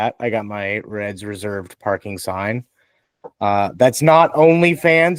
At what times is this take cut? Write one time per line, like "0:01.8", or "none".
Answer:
none

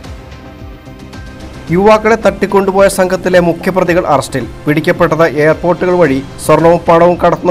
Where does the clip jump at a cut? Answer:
none

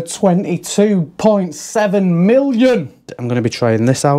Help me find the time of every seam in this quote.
0:03.2

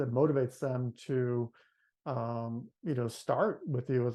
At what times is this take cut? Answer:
none

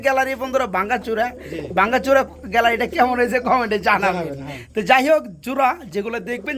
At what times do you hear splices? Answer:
none

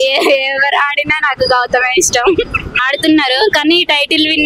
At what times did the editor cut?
0:02.7

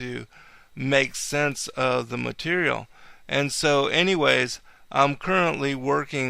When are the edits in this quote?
0:01.5

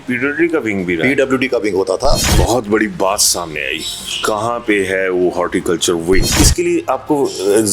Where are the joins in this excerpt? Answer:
0:02.2
0:06.3

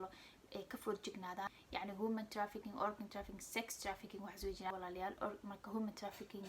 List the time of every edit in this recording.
0:01.5
0:04.7

